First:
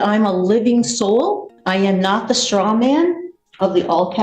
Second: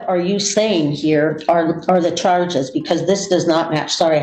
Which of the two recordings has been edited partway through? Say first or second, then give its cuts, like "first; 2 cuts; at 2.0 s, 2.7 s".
first; 1 cut; at 1.5 s